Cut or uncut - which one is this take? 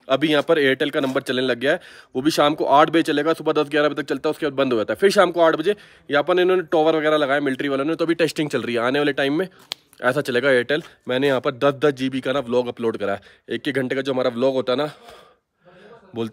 uncut